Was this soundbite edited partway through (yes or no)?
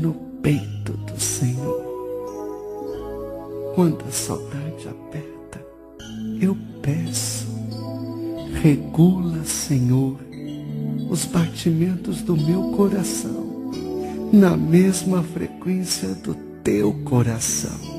no